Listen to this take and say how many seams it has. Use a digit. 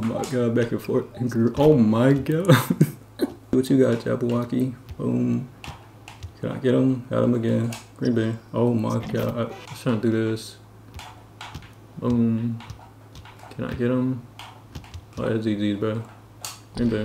2